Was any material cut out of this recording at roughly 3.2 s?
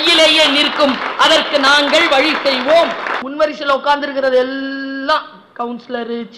yes; 1 cut; at 3.2 s

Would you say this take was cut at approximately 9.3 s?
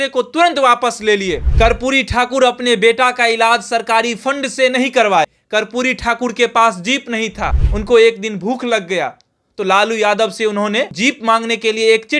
no; 4 cuts; at 1.5 s, 5.4 s, 7.7 s, 10.9 s

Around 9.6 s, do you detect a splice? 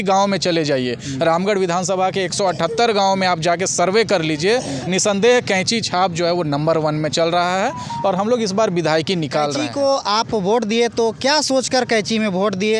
yes; 1 cut; at 9.6 s

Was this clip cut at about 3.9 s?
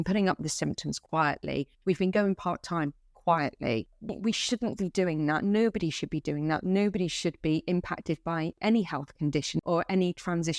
no; 1 cut; at 9.6 s

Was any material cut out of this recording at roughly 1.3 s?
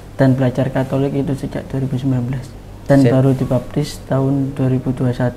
no; 1 cut; at 2.8 s

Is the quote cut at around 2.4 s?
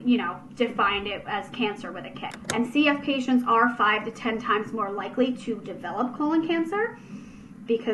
yes; 1 cut; at 2.4 s

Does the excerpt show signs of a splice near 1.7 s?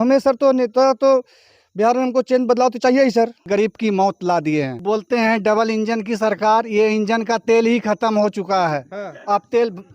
no; 2 cuts; at 3.5 s, 4.8 s

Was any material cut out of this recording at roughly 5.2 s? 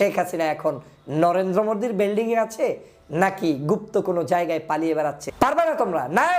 yes; 1 cut; at 5.2 s

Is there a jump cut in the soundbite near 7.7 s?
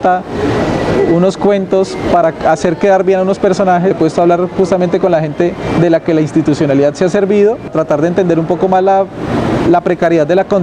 yes; 2 cuts; at 4.0 s, 7.7 s

